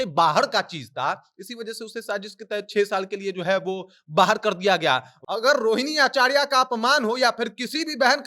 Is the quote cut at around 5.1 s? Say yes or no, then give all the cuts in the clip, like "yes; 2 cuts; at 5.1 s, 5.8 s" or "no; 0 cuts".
yes; 1 cut; at 5.1 s